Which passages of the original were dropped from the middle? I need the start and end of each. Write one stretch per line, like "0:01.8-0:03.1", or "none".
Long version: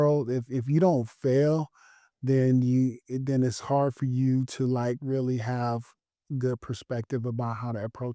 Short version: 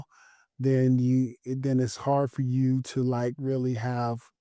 none